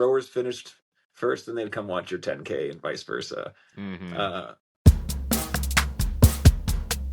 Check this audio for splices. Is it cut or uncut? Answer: cut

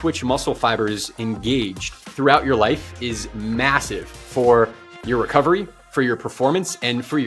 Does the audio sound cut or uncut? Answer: uncut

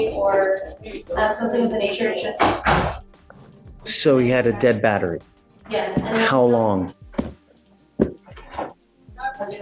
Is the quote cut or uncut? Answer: cut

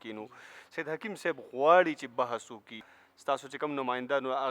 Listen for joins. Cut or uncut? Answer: cut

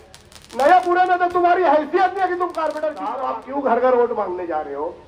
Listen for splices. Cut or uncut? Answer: cut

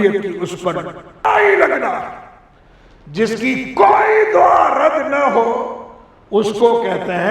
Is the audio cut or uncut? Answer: cut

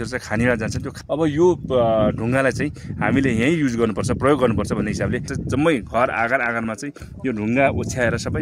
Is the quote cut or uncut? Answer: cut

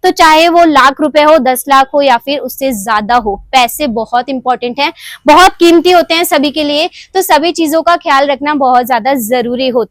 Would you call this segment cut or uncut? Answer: uncut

